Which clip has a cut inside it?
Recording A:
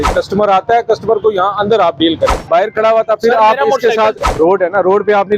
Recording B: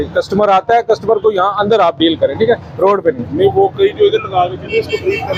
A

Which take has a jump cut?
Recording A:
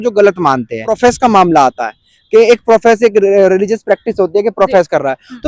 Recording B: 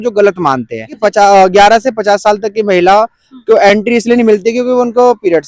B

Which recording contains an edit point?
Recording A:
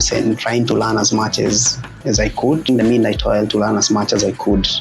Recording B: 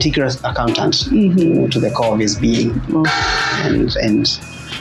A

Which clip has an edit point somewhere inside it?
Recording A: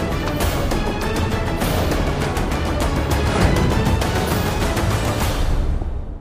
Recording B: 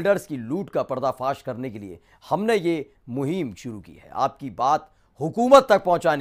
A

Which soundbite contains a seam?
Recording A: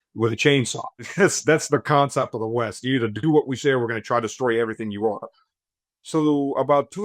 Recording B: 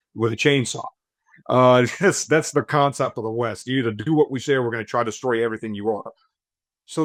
A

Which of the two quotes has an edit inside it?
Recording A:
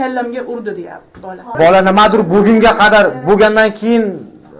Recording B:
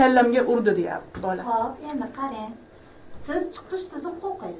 A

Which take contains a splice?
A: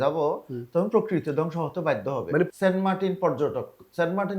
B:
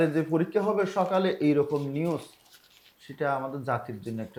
A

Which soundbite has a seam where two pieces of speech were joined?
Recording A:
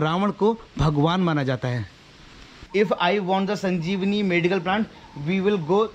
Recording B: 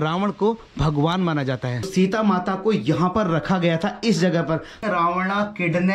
B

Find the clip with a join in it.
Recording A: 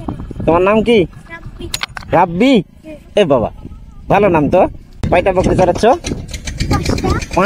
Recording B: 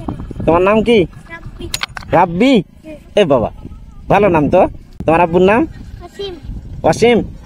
A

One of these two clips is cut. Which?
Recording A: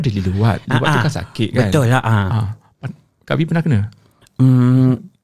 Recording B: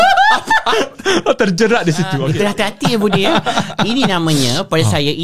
B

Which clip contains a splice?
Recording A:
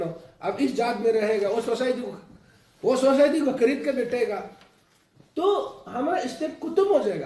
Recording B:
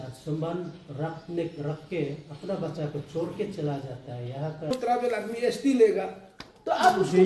B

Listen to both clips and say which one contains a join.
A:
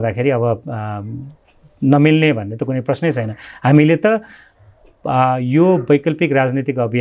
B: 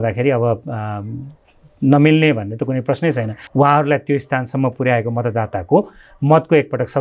B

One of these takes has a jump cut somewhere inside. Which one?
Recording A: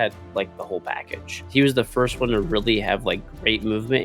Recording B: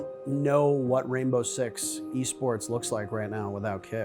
A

